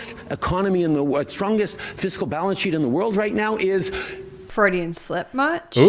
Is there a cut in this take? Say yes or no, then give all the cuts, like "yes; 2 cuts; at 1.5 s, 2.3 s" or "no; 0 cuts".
yes; 1 cut; at 4.4 s